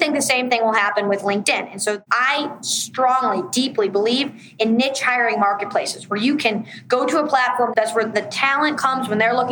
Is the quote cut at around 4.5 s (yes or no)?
no